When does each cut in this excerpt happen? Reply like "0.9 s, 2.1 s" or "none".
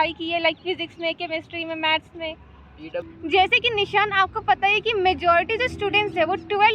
3.1 s